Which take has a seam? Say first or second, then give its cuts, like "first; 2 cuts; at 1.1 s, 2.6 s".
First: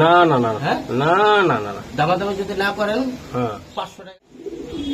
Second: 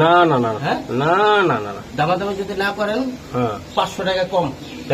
first; 1 cut; at 3.9 s